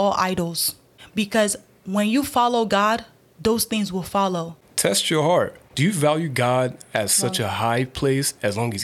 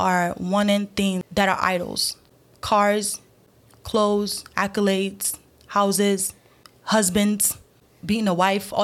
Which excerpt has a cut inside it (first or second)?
first